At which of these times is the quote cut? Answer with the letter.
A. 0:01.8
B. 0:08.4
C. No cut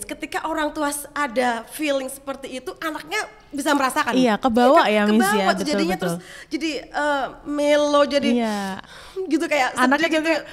C